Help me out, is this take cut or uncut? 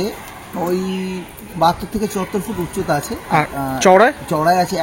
uncut